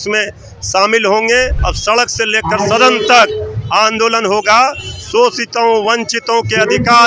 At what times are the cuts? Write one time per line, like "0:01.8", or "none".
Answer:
0:01.6